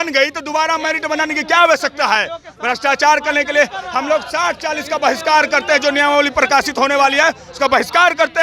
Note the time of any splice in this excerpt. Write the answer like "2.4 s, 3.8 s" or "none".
none

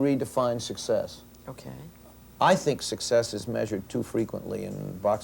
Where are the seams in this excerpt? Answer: none

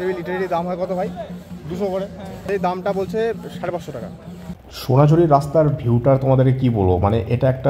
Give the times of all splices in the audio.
2.5 s, 4.6 s

